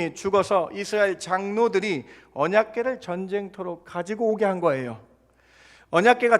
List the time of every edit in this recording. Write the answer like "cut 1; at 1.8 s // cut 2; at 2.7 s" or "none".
none